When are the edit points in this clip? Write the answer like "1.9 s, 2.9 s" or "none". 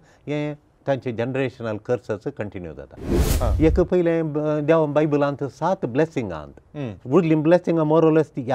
3.3 s